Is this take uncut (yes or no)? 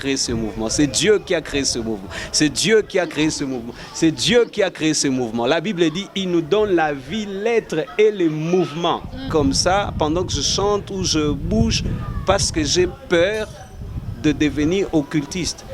no